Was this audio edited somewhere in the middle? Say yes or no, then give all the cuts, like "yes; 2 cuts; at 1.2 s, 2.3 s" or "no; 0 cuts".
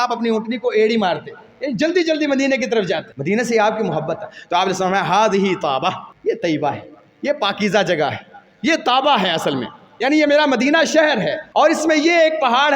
yes; 3 cuts; at 3.1 s, 6.1 s, 11.4 s